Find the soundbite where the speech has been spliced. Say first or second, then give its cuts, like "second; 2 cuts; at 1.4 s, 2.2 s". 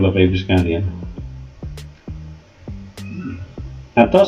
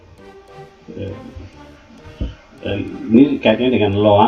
first; 2 cuts; at 1.3 s, 2.9 s